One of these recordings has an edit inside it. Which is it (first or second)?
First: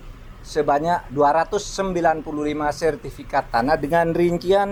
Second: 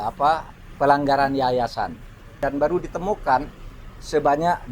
second